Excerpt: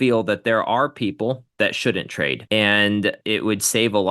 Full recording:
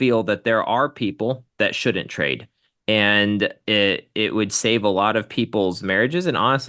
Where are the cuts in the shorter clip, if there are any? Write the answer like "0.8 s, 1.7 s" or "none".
2.4 s, 3.2 s